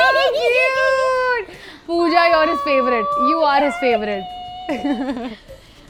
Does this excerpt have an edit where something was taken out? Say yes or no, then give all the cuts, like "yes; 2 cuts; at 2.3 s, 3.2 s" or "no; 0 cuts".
no; 0 cuts